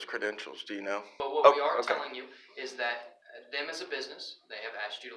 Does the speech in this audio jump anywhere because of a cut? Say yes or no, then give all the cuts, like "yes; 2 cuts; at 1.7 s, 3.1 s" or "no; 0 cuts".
yes; 1 cut; at 1.1 s